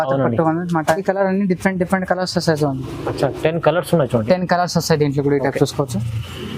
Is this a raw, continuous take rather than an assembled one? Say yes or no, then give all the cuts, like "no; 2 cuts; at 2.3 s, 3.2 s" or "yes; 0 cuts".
no; 1 cut; at 1.0 s